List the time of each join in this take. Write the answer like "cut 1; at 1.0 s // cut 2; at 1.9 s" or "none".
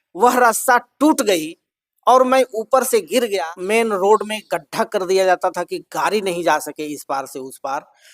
cut 1; at 3.3 s

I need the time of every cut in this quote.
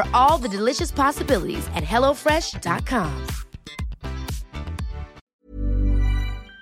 cut 1; at 5.2 s

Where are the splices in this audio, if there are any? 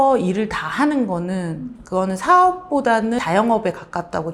cut 1; at 3.2 s

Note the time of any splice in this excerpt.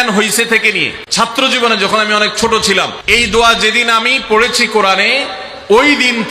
cut 1; at 1.3 s // cut 2; at 3.0 s

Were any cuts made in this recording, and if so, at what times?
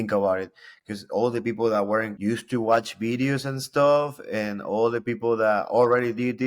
cut 1; at 2.1 s

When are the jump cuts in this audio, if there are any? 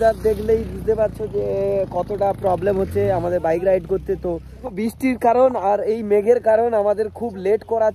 cut 1; at 4.7 s

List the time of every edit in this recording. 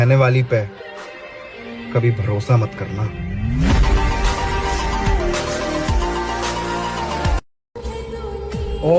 cut 1; at 7.7 s

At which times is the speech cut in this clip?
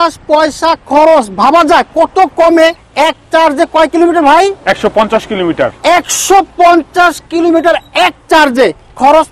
cut 1; at 2.8 s

